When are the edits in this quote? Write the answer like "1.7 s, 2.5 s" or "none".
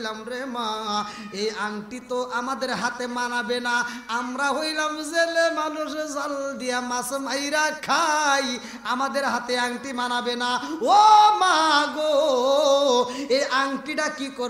none